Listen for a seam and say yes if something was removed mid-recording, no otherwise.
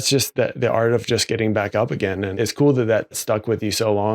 yes